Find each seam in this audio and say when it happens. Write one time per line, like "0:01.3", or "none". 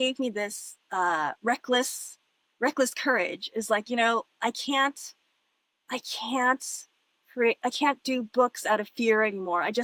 none